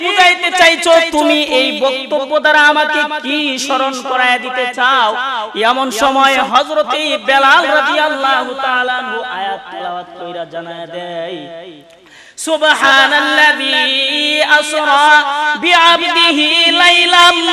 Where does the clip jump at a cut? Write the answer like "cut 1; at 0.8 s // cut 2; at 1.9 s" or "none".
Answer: none